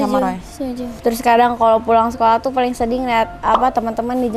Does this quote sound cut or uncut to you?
cut